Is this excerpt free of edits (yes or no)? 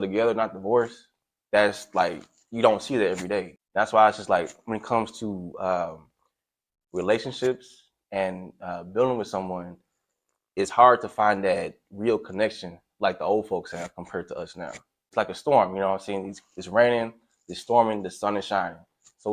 no